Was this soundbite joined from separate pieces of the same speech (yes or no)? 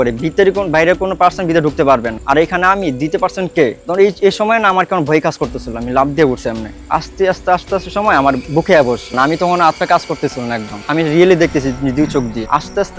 yes